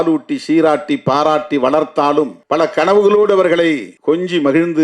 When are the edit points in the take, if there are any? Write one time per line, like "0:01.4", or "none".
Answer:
0:02.4
0:03.9